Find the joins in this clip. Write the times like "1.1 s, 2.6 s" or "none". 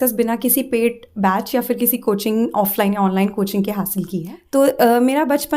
4.3 s